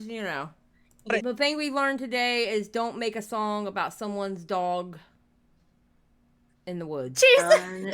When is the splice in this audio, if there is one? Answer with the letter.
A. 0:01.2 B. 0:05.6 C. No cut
A